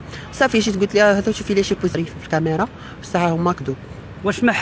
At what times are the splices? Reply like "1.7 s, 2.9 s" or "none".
1.9 s

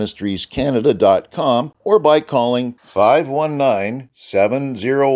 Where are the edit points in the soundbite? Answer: 1.7 s

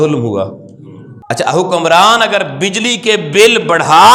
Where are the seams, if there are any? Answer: none

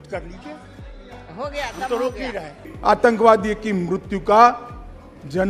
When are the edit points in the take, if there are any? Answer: 2.6 s

